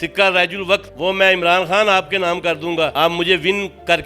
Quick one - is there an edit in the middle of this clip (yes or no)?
yes